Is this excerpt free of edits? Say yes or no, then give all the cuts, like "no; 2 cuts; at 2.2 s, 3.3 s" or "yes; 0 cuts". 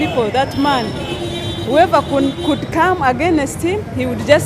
yes; 0 cuts